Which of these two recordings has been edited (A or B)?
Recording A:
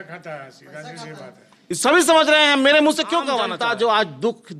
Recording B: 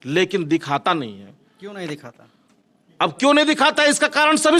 A